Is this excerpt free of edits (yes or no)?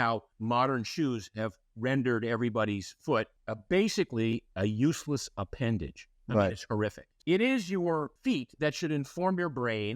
no